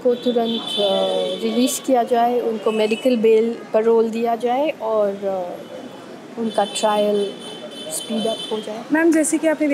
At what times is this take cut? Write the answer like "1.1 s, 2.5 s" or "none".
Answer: none